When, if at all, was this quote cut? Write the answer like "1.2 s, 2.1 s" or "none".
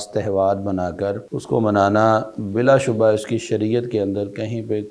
1.3 s